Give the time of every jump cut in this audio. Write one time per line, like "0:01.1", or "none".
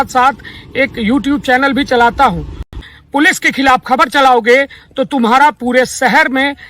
0:02.8